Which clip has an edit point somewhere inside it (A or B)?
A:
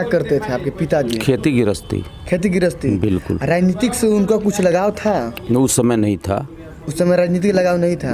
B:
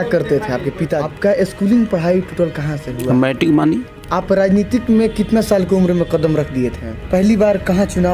B